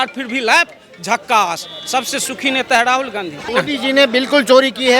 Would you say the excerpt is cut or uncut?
cut